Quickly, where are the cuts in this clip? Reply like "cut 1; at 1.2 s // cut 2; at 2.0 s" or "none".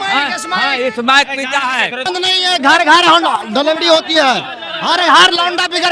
cut 1; at 2.1 s

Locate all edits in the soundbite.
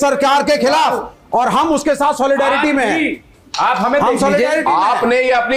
none

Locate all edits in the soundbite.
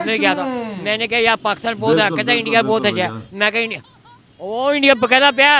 none

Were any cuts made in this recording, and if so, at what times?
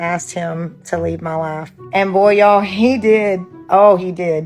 cut 1; at 1.7 s // cut 2; at 3.5 s

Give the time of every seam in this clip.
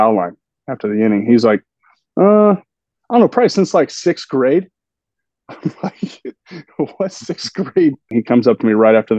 cut 1; at 8.1 s

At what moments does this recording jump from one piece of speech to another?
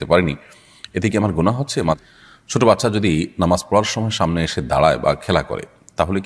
cut 1; at 2.0 s

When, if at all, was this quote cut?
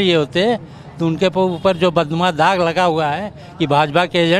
none

